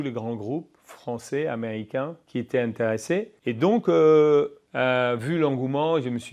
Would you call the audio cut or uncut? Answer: cut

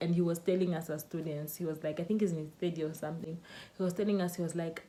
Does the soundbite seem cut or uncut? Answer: uncut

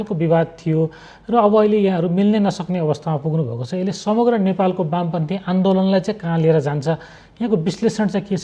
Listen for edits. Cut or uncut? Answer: uncut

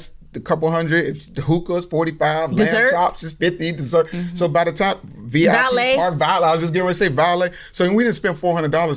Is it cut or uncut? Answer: uncut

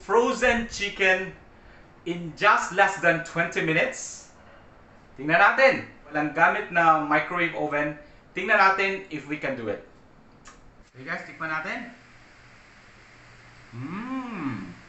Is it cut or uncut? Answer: cut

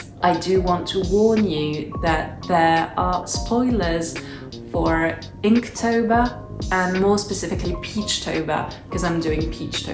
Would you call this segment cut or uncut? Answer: uncut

